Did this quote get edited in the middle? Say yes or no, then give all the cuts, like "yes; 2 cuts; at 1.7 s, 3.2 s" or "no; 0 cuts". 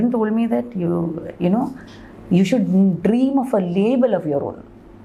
no; 0 cuts